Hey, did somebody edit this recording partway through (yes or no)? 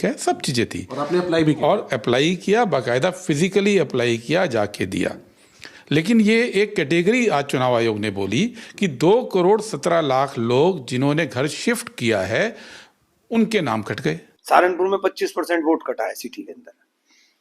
yes